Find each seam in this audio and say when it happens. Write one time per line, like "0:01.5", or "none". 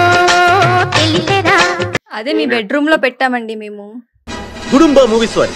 0:02.1